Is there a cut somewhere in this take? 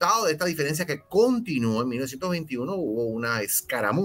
no; 0 cuts

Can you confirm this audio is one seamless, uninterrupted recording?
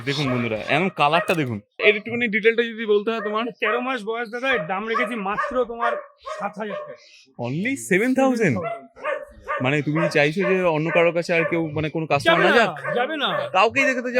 no; 1 cut; at 1.8 s

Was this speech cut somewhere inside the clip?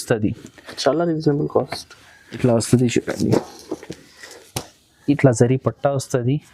yes; 2 cuts; at 2.4 s, 5.0 s

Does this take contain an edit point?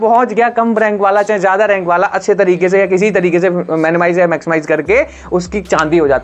no; 0 cuts

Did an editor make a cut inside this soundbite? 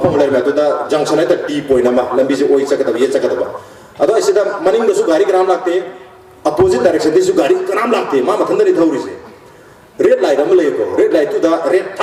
no; 0 cuts

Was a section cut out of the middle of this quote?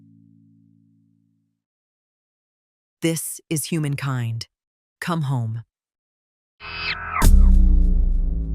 no; 0 cuts

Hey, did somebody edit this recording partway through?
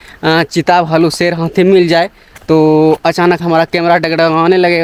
no; 0 cuts

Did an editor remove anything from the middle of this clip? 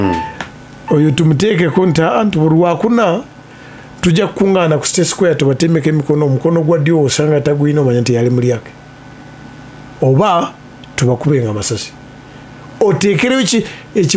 no; 0 cuts

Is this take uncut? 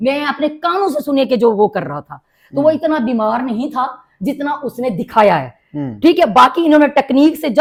yes; 0 cuts

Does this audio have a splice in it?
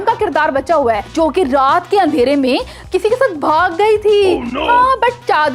no; 0 cuts

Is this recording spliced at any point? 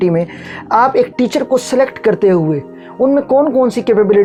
no; 0 cuts

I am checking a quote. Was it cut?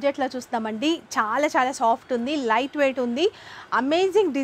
no; 0 cuts

